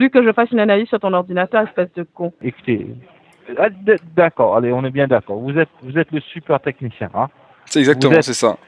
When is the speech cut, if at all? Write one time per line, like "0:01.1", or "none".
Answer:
0:02.4